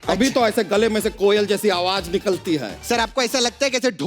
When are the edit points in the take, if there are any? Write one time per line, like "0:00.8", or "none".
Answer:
0:02.8